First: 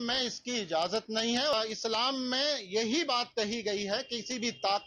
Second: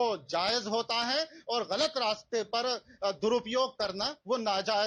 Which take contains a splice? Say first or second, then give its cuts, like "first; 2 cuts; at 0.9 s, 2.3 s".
first; 1 cut; at 1.5 s